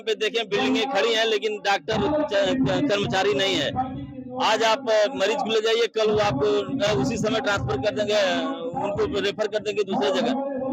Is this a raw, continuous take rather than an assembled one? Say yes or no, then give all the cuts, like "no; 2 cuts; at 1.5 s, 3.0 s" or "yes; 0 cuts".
yes; 0 cuts